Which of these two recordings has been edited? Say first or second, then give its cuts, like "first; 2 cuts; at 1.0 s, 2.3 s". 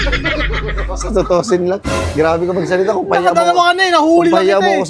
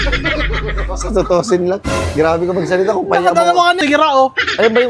second; 1 cut; at 3.8 s